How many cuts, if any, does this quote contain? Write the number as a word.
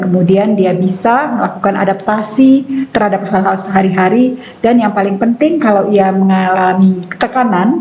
zero